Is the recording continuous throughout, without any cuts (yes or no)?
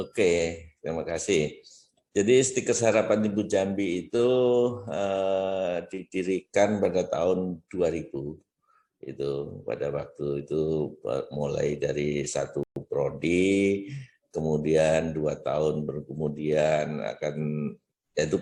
yes